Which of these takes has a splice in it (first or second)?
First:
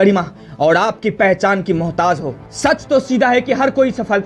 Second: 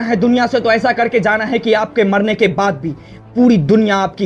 first